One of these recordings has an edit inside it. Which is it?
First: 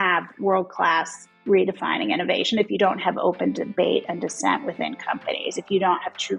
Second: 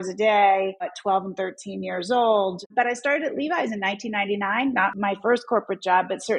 second; 3 cuts; at 0.9 s, 2.7 s, 4.9 s

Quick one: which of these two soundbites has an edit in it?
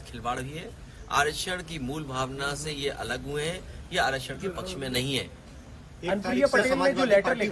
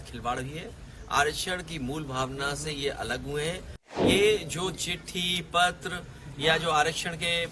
second; 1 cut; at 4.0 s

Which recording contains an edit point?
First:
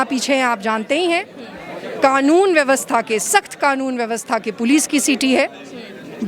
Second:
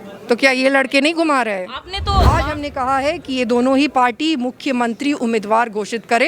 second; 1 cut; at 2.3 s

